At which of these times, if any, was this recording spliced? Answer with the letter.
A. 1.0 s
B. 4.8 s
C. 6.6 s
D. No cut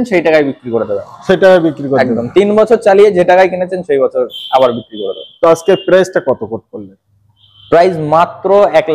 D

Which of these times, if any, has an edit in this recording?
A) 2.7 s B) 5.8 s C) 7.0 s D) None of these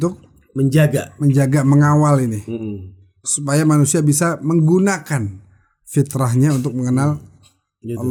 D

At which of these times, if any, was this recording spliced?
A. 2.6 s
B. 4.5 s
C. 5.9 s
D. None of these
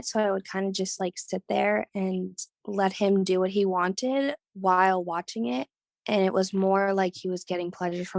B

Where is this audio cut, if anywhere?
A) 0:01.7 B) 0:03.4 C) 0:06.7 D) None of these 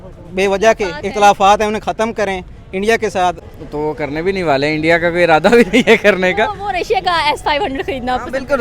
B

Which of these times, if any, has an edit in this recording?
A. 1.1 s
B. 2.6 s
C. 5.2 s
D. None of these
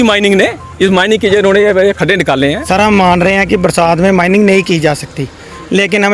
B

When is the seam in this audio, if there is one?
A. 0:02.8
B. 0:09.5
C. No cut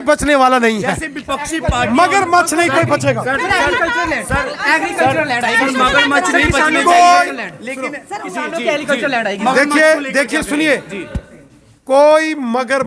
C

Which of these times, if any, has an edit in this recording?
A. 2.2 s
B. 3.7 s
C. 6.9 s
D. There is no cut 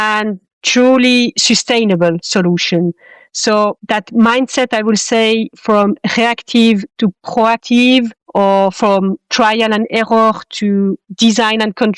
A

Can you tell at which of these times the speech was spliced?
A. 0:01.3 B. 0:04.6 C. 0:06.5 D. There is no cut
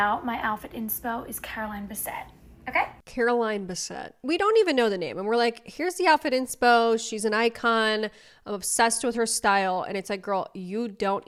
D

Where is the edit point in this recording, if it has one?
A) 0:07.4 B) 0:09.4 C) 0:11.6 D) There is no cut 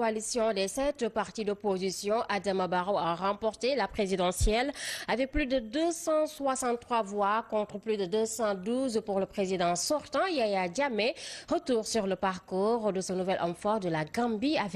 A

